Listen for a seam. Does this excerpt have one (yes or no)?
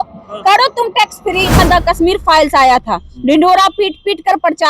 yes